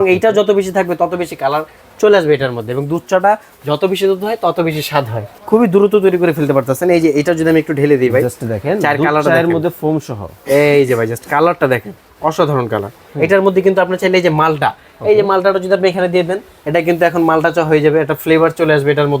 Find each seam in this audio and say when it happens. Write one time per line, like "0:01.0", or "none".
0:05.3
0:13.0